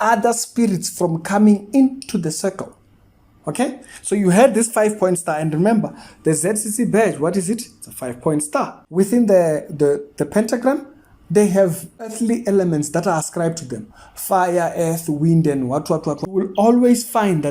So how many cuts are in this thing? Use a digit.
3